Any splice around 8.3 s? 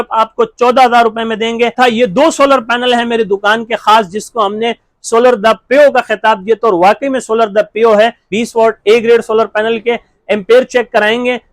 yes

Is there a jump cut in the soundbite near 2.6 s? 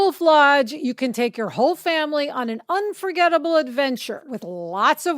no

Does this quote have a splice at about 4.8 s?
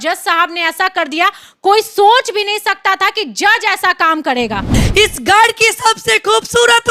yes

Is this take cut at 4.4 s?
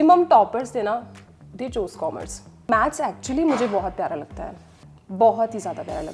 no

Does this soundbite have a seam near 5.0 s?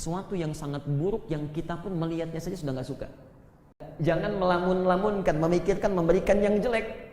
no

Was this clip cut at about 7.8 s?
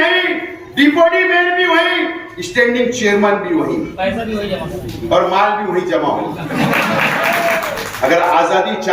yes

